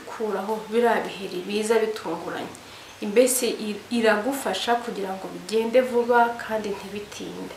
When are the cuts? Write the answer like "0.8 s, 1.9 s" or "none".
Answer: none